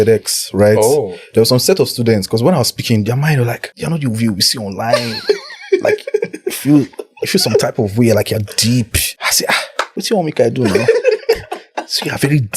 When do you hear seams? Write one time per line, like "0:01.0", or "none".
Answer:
0:03.7
0:09.6